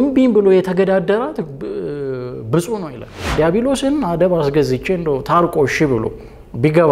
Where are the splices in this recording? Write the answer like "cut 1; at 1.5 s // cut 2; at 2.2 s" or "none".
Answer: cut 1; at 3.3 s